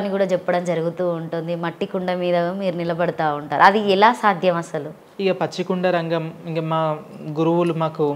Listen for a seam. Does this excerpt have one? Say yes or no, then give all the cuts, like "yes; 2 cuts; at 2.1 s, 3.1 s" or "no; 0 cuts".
yes; 1 cut; at 5.0 s